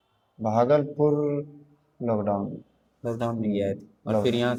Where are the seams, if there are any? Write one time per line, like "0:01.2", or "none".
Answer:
none